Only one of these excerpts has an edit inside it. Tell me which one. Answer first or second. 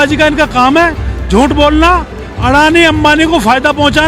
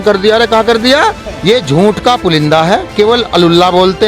second